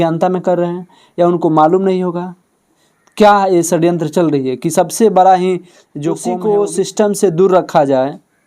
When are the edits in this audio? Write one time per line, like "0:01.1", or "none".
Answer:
0:06.3